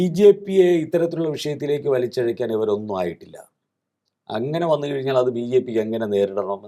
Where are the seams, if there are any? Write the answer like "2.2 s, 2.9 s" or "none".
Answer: none